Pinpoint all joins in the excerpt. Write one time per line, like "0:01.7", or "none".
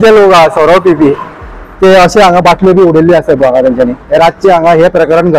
none